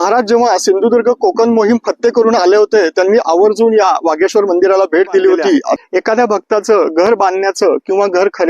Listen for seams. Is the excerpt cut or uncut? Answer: cut